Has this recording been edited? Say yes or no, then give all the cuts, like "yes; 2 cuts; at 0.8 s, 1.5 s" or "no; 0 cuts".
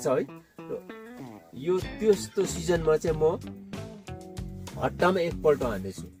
no; 0 cuts